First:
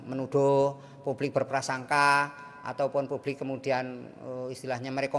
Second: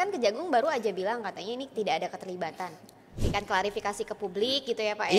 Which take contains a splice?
second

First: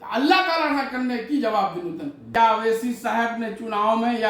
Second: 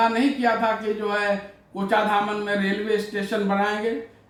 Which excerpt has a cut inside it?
first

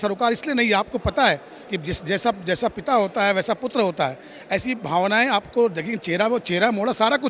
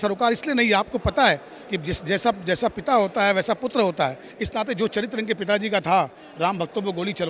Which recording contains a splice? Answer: second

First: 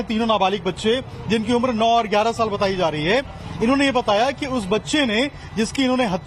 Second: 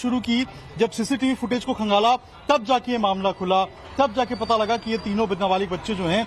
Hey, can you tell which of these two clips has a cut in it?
first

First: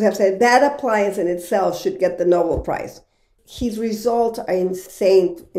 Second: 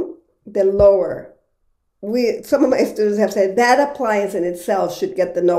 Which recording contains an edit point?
first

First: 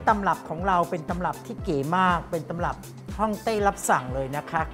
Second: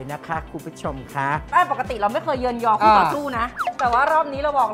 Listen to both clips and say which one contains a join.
second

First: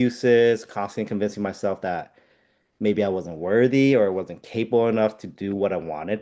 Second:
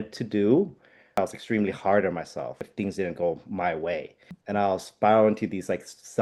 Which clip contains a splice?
second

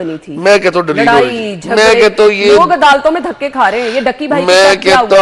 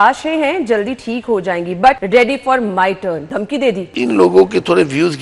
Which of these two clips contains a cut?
second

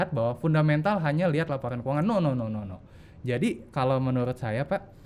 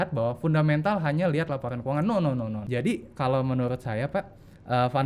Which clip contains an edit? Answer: second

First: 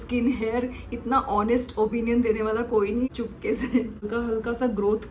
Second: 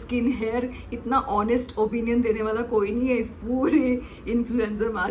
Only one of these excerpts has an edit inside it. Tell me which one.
first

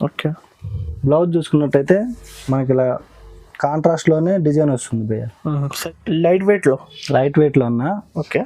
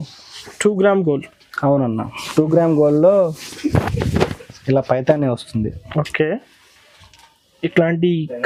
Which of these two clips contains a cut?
first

